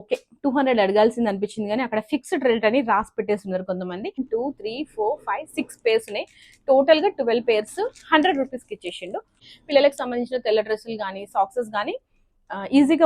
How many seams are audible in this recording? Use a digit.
2